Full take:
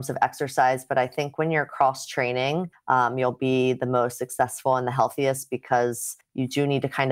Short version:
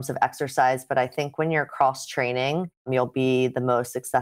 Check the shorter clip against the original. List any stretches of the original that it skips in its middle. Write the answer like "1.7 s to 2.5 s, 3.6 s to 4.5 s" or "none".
2.8 s to 3.1 s